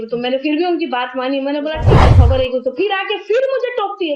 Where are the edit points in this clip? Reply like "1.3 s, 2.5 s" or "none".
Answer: 2.0 s